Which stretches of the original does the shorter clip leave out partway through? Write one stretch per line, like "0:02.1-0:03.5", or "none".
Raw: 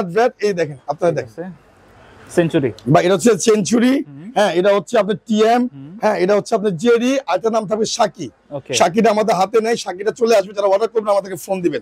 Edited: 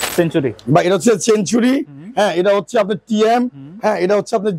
none